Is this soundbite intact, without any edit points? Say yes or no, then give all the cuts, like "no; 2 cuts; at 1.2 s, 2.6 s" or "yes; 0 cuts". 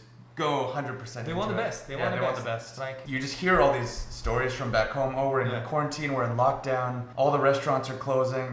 no; 1 cut; at 3.0 s